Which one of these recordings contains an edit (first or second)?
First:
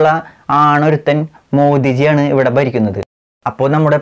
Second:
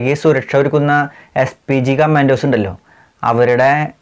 first